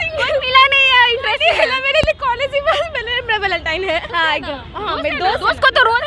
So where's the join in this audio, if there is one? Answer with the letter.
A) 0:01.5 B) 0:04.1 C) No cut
B